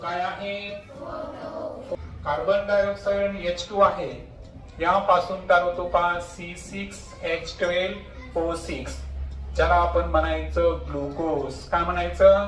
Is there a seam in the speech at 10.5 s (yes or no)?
no